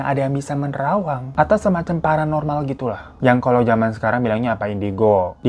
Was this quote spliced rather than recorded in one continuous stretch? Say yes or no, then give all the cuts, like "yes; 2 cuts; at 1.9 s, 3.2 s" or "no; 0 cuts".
no; 0 cuts